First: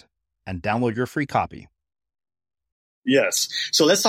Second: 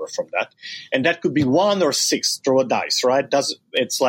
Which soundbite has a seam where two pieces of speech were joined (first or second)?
first